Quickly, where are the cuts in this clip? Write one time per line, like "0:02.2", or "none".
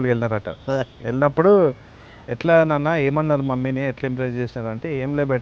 none